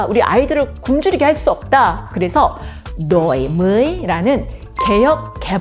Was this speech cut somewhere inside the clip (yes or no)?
yes